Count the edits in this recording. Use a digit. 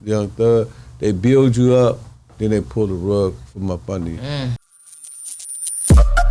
1